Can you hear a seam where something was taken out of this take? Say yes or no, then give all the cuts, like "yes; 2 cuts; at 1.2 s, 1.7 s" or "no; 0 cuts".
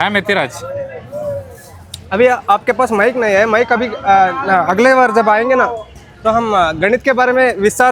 no; 0 cuts